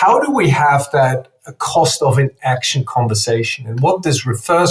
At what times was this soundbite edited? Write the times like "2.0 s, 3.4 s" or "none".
none